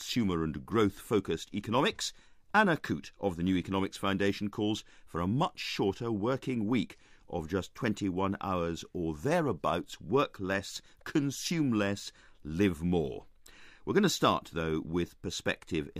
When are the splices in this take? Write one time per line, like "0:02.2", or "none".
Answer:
0:04.1